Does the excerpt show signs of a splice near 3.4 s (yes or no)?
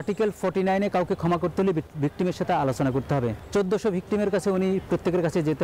yes